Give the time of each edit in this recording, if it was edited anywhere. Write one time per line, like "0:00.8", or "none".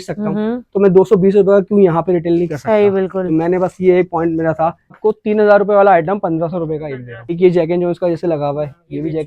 0:04.9
0:07.3